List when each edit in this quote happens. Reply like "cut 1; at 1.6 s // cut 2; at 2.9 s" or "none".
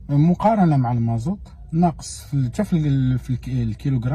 none